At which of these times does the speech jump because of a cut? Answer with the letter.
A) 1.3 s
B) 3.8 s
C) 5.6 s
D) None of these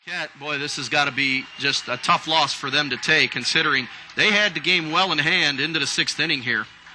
D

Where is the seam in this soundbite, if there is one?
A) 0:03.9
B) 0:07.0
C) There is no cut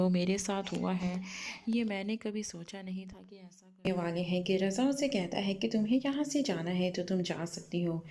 A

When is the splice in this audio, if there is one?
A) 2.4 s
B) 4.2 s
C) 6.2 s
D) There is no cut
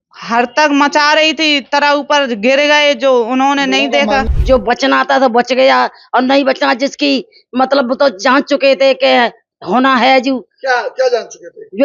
B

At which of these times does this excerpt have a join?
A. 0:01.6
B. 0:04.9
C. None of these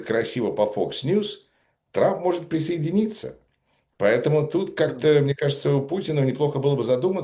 C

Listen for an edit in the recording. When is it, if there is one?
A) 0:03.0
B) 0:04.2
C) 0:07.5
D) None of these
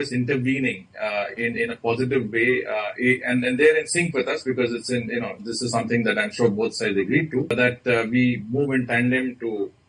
C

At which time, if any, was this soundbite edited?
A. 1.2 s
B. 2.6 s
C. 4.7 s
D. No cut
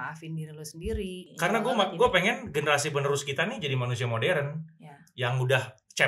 A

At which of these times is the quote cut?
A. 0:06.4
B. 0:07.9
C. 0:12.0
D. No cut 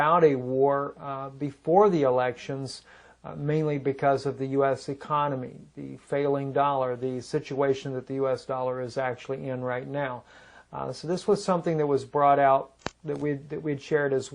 A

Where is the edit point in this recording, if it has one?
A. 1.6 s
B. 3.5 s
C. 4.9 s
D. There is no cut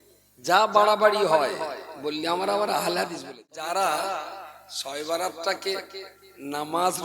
B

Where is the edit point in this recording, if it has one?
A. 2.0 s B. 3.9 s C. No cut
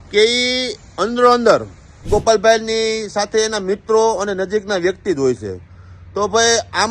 A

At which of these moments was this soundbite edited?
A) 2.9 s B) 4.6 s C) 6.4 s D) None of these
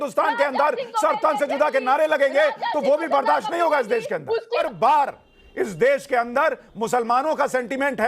B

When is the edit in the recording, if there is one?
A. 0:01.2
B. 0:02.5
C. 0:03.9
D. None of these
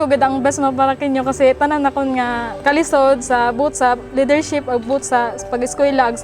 B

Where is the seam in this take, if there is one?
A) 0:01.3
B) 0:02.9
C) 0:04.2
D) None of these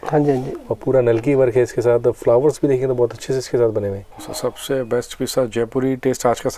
C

